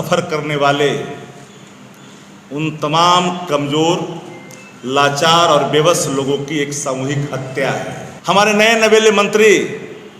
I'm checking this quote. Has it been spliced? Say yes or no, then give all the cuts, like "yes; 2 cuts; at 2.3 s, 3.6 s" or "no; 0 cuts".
yes; 1 cut; at 8.1 s